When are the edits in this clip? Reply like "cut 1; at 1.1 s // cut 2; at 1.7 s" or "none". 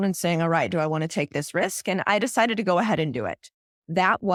none